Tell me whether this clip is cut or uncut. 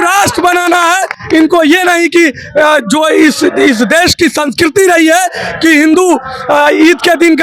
uncut